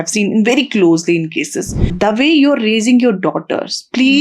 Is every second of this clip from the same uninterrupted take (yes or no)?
no